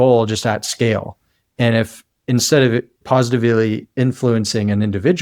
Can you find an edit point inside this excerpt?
yes; 1 cut; at 2.9 s

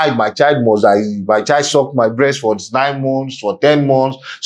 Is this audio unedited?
yes; 0 cuts

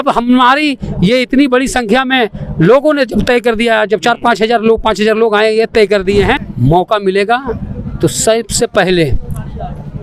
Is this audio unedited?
no; 1 cut; at 6.5 s

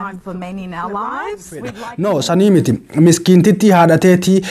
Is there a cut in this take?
yes; 1 cut; at 1.8 s

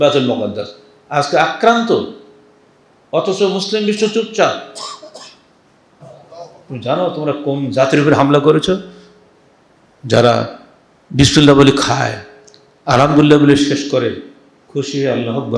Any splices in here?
yes; 1 cut; at 6.0 s

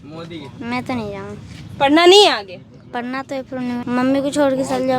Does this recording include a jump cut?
yes; 1 cut; at 3.8 s

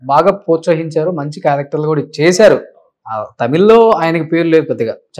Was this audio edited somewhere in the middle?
no; 0 cuts

